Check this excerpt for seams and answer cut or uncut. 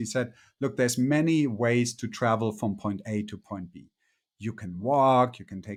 uncut